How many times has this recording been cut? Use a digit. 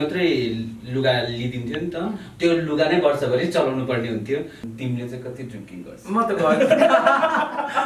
1